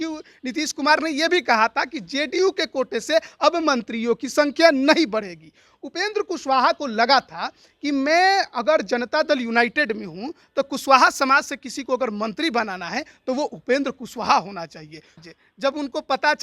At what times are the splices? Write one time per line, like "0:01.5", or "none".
0:15.3